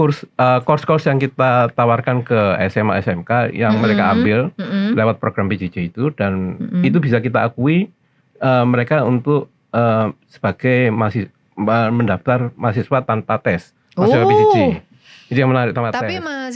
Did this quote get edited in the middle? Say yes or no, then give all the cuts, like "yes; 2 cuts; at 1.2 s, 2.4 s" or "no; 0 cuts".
no; 0 cuts